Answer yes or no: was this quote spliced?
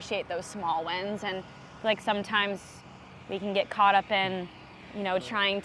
no